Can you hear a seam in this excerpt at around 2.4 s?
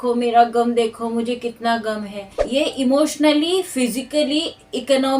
yes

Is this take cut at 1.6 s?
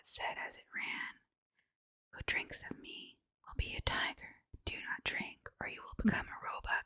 no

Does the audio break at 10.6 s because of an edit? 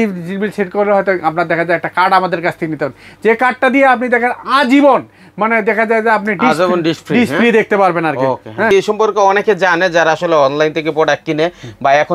no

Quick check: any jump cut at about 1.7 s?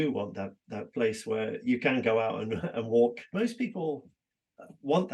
no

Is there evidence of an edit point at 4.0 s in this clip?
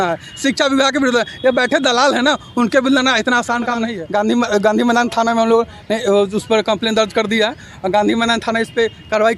yes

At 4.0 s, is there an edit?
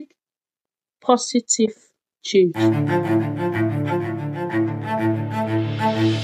no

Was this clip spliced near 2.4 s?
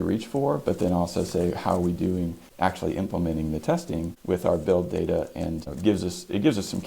yes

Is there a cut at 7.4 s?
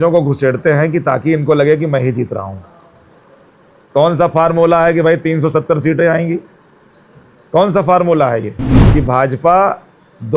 no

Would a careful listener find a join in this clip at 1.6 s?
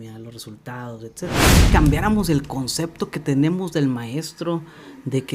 yes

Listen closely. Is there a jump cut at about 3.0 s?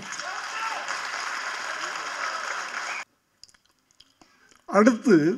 yes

